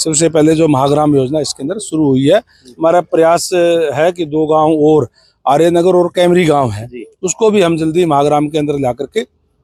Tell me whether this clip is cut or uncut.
uncut